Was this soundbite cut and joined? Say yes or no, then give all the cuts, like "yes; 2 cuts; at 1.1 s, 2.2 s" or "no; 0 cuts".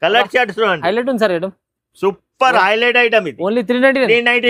no; 0 cuts